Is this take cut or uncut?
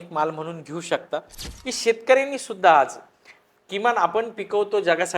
cut